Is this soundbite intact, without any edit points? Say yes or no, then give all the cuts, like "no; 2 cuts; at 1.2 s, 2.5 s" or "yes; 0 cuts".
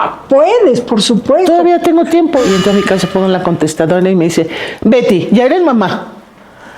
no; 1 cut; at 2.4 s